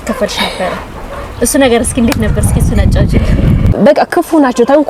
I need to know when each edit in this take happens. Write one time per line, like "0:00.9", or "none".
0:03.7